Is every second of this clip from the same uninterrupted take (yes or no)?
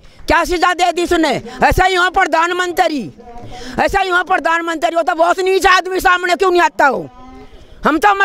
yes